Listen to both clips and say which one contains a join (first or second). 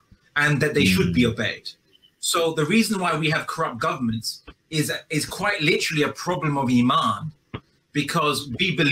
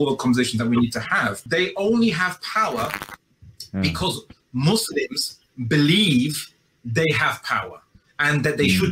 second